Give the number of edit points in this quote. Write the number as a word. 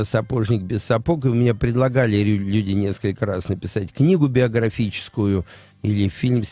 zero